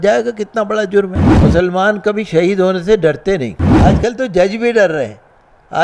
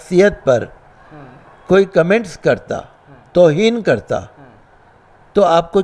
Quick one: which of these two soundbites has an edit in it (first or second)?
first